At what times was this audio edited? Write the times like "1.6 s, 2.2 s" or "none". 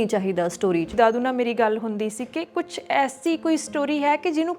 0.9 s